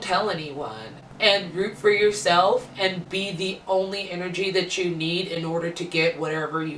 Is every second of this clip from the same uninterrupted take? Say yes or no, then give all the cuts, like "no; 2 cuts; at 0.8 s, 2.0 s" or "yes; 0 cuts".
yes; 0 cuts